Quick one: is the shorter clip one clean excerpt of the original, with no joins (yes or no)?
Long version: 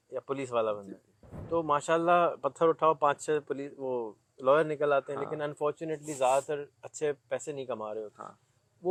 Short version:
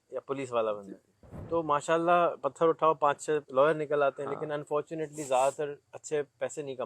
no